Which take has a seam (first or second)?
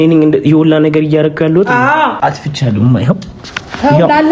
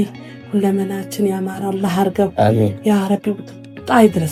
first